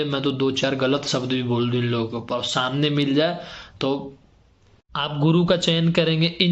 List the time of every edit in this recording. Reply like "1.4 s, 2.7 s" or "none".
4.9 s

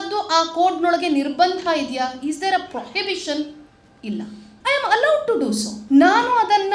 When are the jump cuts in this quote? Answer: none

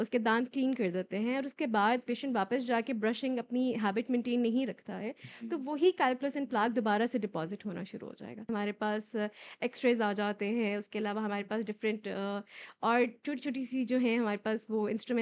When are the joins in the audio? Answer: 8.5 s

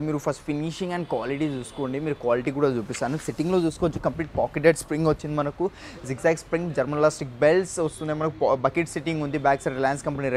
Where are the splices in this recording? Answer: none

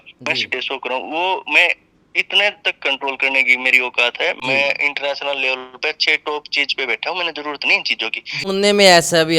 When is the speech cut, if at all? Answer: 4.4 s, 8.5 s

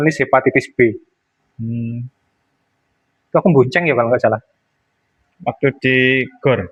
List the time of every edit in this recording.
none

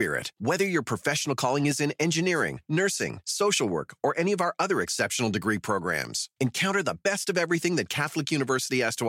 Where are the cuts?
none

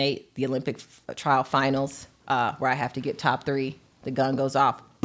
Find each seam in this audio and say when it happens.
none

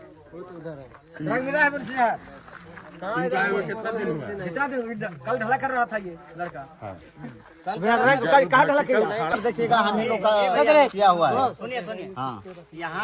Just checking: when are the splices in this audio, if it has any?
9.4 s

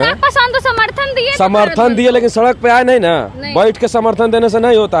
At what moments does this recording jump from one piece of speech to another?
none

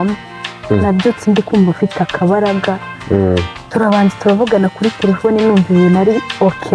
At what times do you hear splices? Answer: none

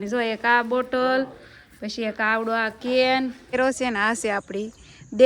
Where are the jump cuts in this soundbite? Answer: 3.5 s

